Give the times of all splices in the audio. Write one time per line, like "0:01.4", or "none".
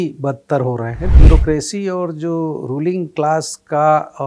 0:01.1

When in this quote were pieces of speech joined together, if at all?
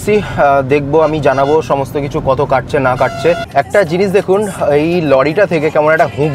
0:03.4

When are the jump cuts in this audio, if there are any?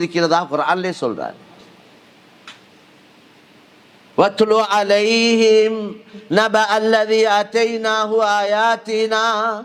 none

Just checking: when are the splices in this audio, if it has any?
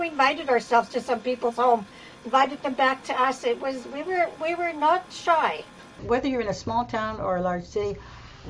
0:06.0

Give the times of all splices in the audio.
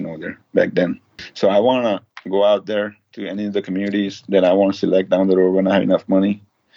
none

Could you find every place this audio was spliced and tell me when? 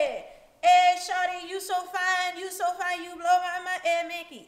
none

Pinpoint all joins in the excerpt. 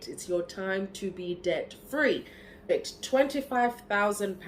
0:02.7

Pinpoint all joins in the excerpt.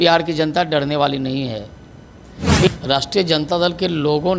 0:02.7

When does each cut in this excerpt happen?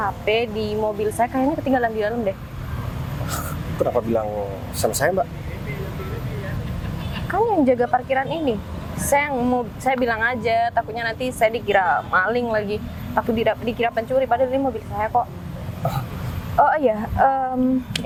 none

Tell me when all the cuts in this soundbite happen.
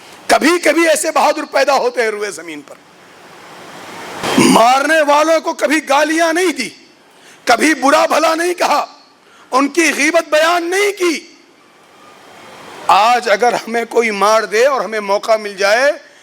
0:04.2

